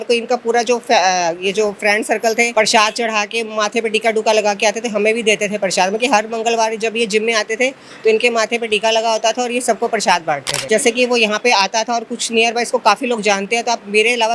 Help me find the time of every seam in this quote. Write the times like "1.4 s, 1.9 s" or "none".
2.5 s, 10.6 s